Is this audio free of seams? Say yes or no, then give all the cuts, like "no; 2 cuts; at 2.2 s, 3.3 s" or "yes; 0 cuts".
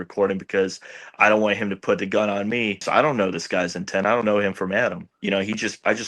no; 2 cuts; at 2.8 s, 5.1 s